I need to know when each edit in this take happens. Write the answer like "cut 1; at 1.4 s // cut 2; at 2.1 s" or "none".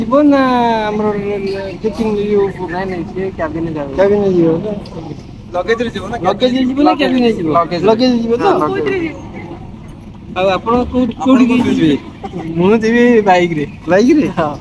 none